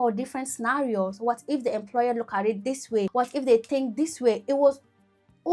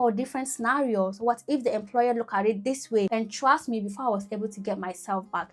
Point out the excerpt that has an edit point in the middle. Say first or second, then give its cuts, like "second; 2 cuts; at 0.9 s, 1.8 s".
second; 1 cut; at 3.1 s